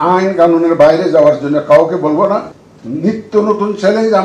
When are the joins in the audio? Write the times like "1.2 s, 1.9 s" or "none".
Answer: 2.6 s